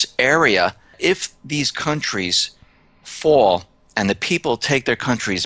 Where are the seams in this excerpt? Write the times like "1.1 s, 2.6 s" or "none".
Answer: 1.0 s

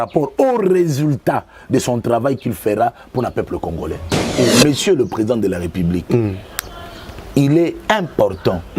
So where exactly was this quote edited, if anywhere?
4.2 s

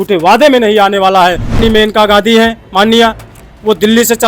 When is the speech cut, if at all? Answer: 1.6 s

